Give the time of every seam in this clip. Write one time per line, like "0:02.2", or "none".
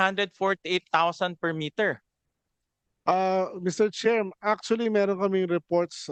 none